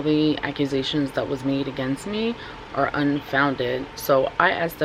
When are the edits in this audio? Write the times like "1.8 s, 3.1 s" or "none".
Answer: 3.9 s